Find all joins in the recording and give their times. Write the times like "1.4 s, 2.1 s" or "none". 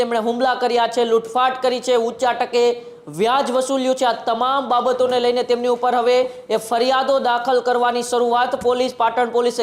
none